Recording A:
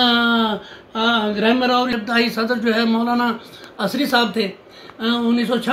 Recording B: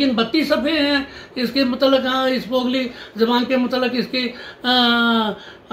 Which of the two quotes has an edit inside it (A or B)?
A